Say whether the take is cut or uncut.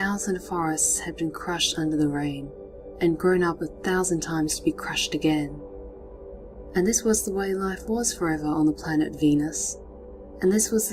cut